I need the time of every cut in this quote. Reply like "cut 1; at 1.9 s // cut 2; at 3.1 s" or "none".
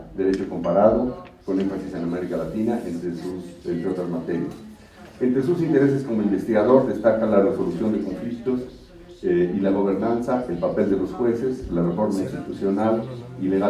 cut 1; at 4.5 s